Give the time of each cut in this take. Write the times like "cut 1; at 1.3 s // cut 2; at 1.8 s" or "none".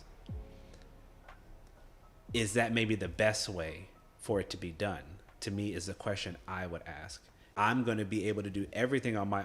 cut 1; at 7.4 s